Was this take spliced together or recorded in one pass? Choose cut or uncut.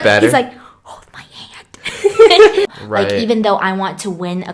cut